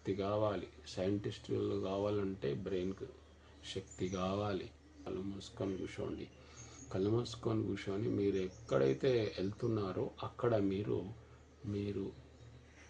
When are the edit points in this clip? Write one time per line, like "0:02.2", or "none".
0:05.0

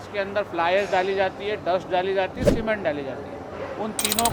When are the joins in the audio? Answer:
none

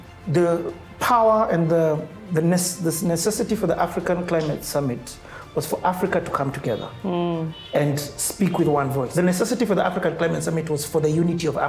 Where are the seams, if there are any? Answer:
0:09.1

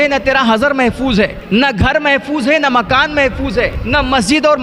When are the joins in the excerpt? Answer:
0:01.4
0:03.8

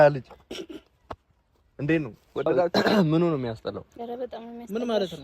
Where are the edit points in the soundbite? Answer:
0:02.7

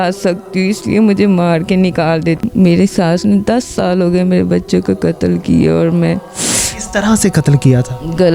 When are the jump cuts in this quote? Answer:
0:02.4

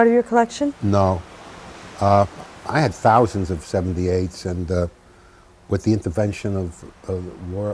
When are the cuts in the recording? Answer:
none

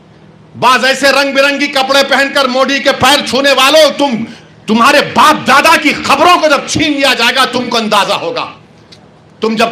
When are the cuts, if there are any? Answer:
none

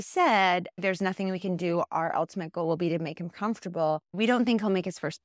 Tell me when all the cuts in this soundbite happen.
0:00.8
0:04.1

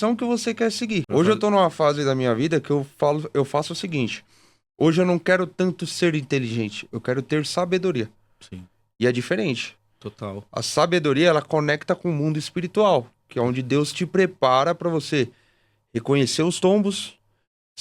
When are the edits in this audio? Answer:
0:01.1

